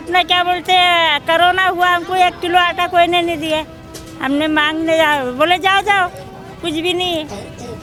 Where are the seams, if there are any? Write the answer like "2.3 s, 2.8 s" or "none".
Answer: none